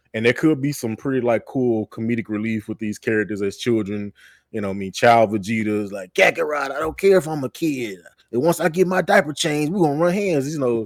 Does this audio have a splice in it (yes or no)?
no